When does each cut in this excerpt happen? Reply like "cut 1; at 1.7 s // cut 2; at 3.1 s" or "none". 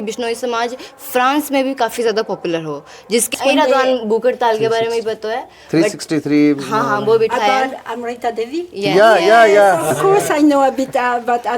cut 1; at 3.3 s